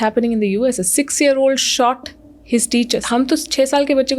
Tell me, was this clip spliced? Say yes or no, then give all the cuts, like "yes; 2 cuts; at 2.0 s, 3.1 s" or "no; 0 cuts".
yes; 1 cut; at 3.0 s